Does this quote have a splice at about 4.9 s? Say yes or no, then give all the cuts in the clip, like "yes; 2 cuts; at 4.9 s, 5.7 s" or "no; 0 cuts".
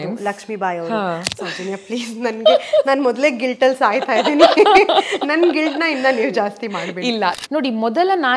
no; 2 cuts; at 1.3 s, 7.4 s